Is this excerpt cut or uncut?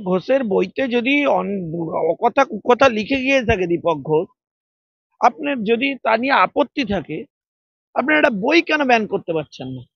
uncut